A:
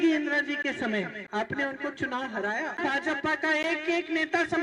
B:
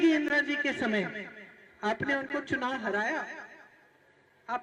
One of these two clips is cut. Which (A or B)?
A